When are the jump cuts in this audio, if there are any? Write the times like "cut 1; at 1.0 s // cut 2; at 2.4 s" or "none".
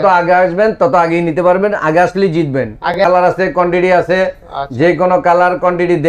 cut 1; at 3.0 s